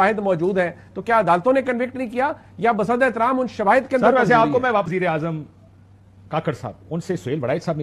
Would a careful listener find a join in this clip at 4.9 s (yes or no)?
yes